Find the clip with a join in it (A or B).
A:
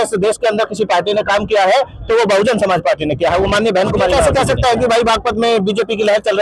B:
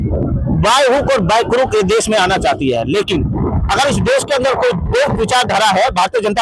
A